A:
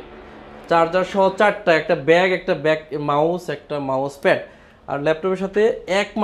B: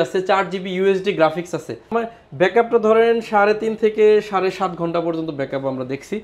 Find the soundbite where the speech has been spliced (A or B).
B